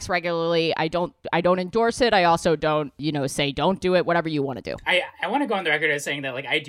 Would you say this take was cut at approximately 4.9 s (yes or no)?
yes